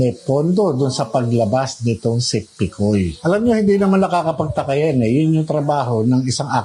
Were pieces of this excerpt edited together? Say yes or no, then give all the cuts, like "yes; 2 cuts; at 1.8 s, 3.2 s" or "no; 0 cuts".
no; 0 cuts